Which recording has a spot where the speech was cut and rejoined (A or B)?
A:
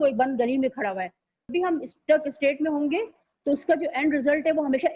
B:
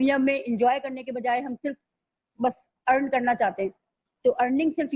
A